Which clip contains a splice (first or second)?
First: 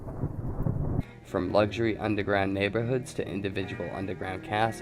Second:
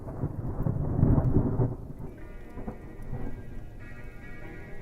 second